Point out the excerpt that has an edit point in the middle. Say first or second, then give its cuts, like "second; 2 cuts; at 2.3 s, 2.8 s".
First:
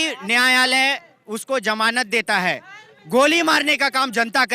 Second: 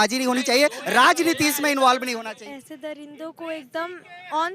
second; 1 cut; at 2.2 s